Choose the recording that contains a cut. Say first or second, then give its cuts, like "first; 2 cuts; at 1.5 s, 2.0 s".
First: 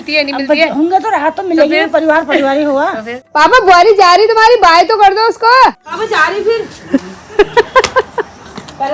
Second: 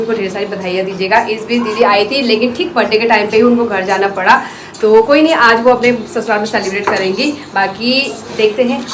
first; 2 cuts; at 3.2 s, 5.8 s